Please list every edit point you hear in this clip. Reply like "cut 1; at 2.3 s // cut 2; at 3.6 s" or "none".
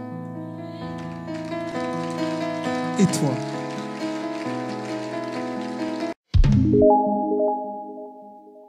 cut 1; at 6.1 s